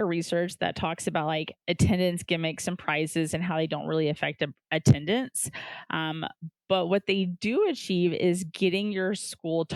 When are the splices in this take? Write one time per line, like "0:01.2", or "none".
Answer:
0:01.5